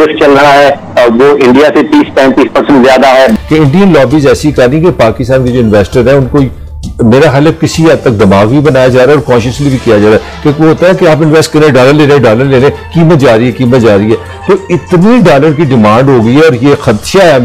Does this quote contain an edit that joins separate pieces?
yes; 1 cut; at 3.4 s

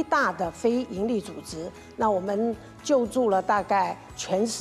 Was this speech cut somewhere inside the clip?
no; 0 cuts

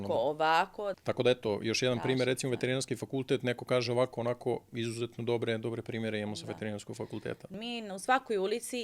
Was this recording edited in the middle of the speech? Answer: yes; 2 cuts; at 1.0 s, 7.5 s

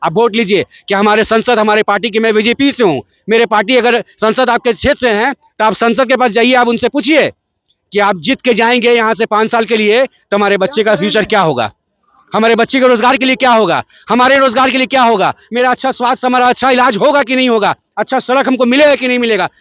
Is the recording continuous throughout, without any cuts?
yes; 0 cuts

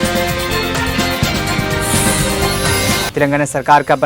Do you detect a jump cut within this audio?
yes; 1 cut; at 3.1 s

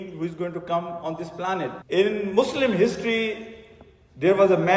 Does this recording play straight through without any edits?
yes; 0 cuts

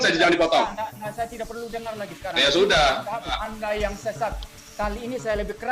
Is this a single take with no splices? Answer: no; 1 cut; at 3.4 s

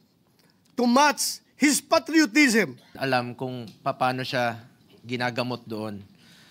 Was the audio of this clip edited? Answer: yes; 1 cut; at 3.0 s

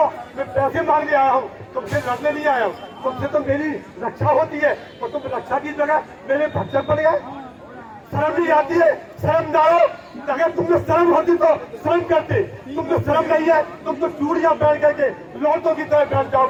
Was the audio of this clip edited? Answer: no; 0 cuts

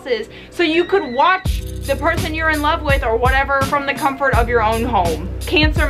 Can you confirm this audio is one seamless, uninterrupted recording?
yes; 0 cuts

